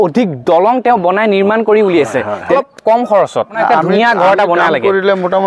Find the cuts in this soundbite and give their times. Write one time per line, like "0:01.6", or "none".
0:02.4
0:03.5